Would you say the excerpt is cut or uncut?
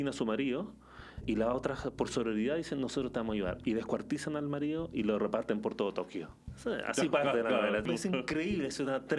cut